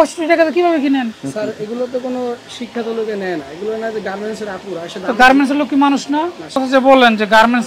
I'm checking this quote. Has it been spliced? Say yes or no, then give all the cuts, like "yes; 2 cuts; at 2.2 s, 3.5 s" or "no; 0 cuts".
yes; 1 cut; at 6.6 s